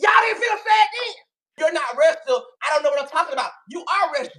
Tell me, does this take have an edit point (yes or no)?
yes